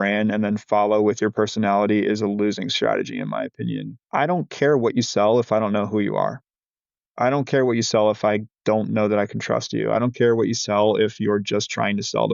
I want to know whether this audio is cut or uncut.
cut